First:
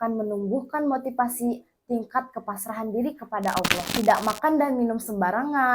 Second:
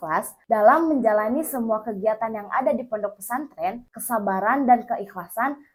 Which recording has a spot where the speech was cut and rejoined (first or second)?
first